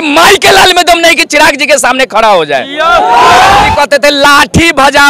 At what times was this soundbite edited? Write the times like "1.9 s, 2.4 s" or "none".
3.7 s